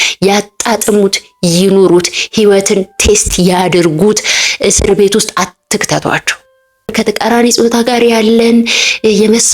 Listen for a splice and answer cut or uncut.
cut